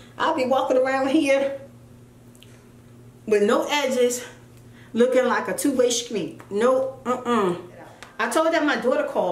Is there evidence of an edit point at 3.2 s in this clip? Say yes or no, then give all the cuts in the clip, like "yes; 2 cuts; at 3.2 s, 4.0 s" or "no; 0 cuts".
no; 1 cut; at 8.2 s